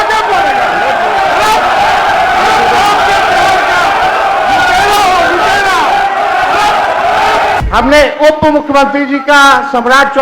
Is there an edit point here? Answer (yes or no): yes